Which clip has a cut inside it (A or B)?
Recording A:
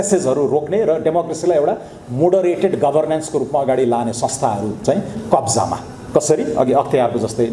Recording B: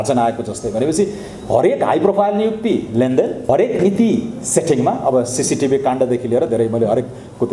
B